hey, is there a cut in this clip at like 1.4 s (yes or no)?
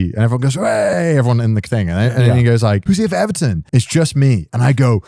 no